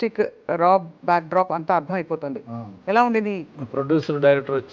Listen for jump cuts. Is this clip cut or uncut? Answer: cut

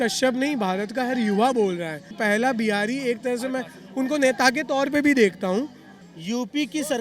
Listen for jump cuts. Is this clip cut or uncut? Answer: cut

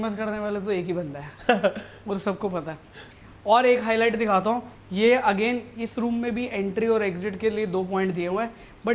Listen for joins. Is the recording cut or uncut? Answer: uncut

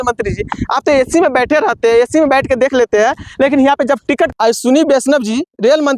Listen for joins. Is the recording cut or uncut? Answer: cut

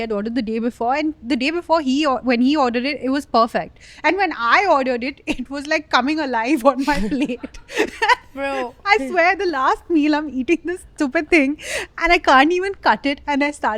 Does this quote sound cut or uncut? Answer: uncut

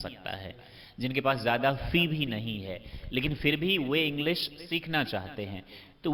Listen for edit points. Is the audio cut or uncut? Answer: uncut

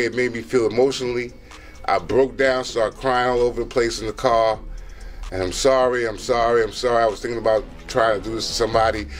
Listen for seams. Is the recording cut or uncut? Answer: uncut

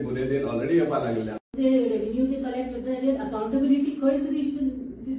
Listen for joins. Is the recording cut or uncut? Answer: cut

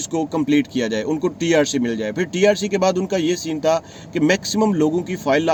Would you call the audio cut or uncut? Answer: uncut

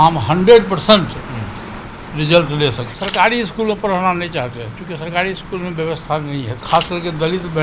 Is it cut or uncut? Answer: cut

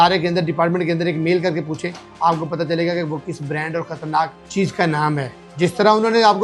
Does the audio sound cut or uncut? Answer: cut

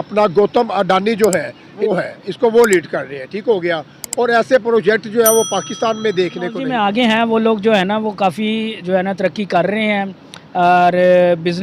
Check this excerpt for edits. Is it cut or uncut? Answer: cut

